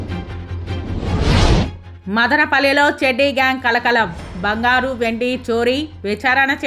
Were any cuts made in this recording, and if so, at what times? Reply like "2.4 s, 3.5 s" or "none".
1.8 s